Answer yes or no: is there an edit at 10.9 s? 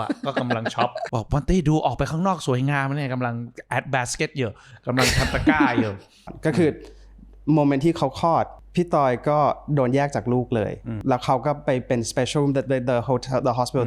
yes